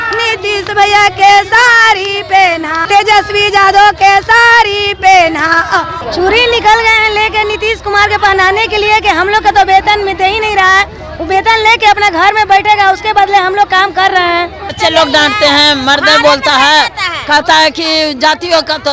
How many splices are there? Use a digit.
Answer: 3